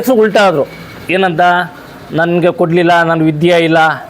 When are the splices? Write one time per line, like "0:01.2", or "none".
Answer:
none